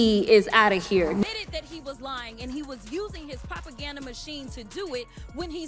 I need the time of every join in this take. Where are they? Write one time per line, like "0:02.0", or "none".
none